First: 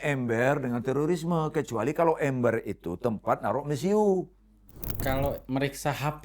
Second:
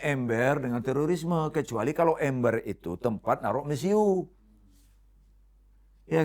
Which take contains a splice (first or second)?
first